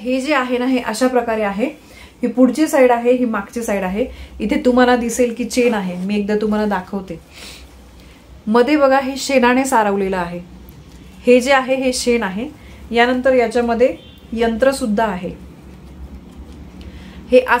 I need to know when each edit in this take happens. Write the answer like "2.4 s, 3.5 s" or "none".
none